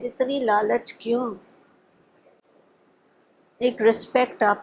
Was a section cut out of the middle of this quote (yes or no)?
no